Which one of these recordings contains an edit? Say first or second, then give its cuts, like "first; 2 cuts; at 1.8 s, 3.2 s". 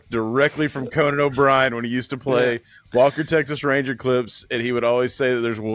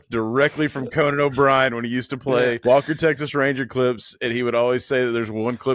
second; 1 cut; at 2.6 s